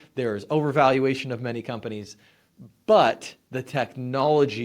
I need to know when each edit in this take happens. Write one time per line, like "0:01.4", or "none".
none